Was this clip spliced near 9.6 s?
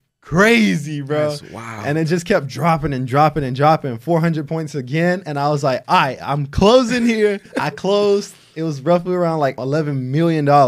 yes; 2 cuts; at 7.5 s, 9.6 s

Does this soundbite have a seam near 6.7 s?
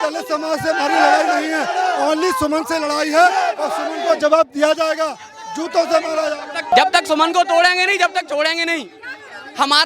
yes; 1 cut; at 6.7 s

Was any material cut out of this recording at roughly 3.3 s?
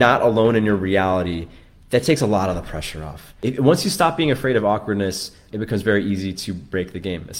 yes; 2 cuts; at 3.3 s, 5.4 s

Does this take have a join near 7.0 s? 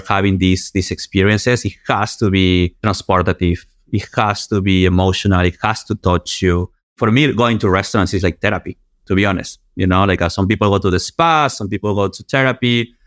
yes; 2 cuts; at 2.8 s, 7.0 s

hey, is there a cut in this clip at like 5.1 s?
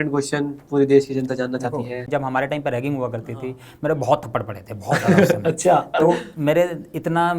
no; 1 cut; at 2.1 s

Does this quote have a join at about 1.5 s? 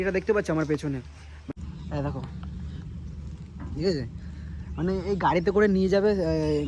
yes; 1 cut; at 1.5 s

